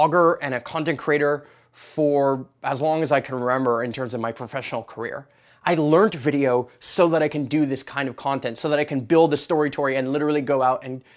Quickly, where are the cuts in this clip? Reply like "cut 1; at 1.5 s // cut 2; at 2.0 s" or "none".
none